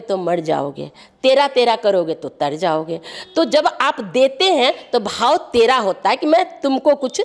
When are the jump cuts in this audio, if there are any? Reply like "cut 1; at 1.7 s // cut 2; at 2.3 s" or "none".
none